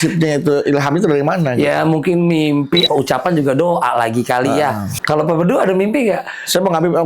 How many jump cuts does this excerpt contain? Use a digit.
2